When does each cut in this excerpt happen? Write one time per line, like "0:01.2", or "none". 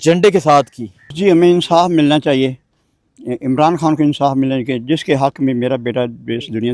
0:01.1